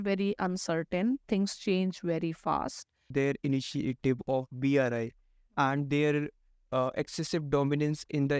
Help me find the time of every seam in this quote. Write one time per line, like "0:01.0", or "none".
0:03.1